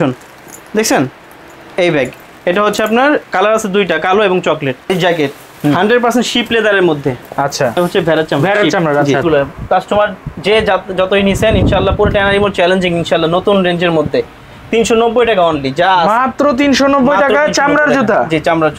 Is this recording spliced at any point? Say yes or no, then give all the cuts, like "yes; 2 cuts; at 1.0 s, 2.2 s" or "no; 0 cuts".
yes; 2 cuts; at 4.9 s, 9.2 s